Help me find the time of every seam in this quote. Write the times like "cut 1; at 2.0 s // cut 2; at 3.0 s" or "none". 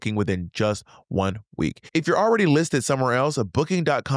none